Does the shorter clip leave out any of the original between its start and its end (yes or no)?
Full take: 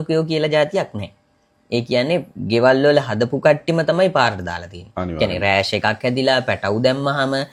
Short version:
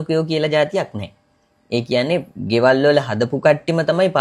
no